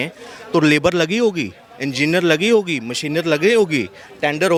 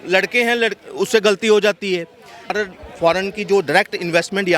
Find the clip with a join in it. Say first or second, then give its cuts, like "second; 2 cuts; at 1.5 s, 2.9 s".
second; 1 cut; at 2.5 s